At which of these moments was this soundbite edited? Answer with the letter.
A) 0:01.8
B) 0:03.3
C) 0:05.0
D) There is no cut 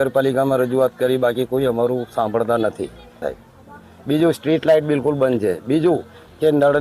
B